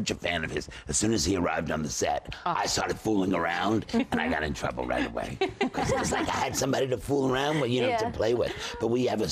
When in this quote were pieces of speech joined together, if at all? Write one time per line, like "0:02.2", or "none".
0:06.7